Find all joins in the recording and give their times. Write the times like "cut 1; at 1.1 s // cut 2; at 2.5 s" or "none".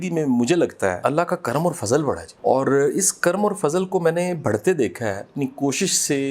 cut 1; at 1.0 s // cut 2; at 2.3 s // cut 3; at 5.3 s